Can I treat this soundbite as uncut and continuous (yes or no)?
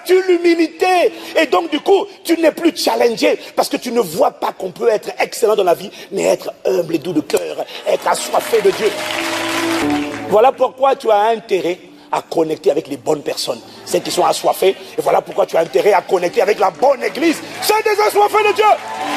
no